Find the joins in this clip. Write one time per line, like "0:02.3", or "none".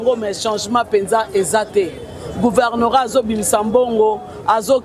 none